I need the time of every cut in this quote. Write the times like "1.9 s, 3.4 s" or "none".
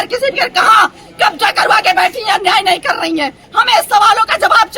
3.4 s

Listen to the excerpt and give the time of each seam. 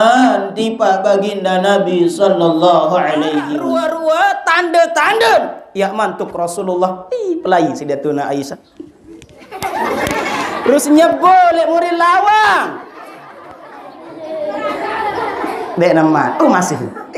3.6 s

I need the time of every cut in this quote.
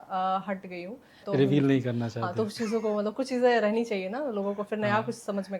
1.2 s

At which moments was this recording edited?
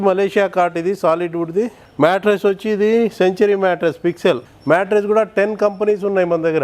1.8 s, 4.5 s

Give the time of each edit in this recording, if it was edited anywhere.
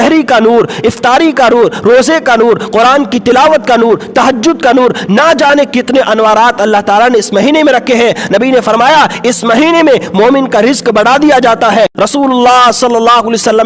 11.9 s

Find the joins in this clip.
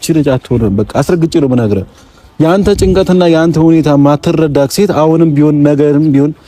none

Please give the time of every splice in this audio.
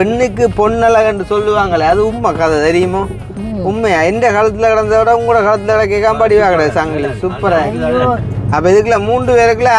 8.2 s

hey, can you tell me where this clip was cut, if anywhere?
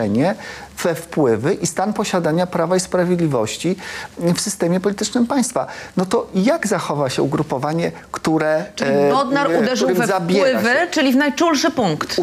none

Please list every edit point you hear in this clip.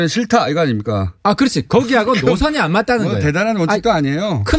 3.5 s

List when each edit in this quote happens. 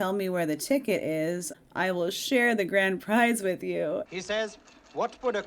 4.0 s

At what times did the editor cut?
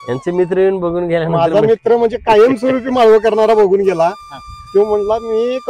none

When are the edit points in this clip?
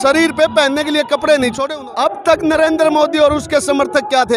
1.6 s

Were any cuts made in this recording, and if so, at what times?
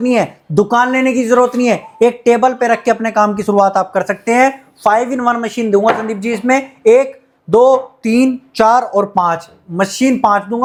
none

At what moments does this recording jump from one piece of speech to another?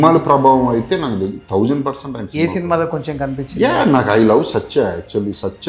none

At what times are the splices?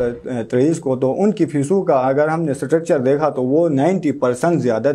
none

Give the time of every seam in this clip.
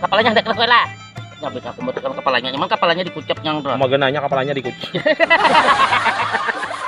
5.7 s

